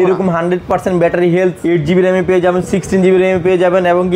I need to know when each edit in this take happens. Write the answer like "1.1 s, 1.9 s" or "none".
none